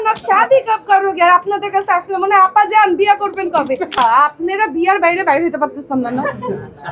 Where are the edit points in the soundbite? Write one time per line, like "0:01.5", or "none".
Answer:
0:04.0